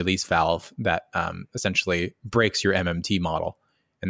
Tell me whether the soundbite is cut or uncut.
uncut